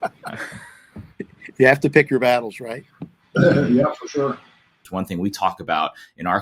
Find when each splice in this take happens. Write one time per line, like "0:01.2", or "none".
0:04.8